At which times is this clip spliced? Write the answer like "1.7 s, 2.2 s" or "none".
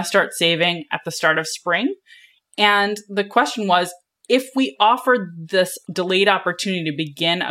5.8 s